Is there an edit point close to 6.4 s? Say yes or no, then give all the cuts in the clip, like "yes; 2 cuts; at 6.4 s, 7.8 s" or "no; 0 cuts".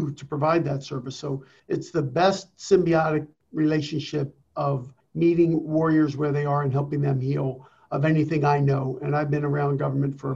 no; 3 cuts; at 1.5 s, 3.4 s, 4.7 s